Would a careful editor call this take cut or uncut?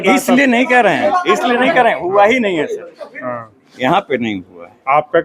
uncut